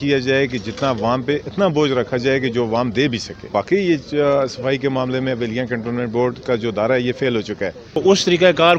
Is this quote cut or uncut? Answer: cut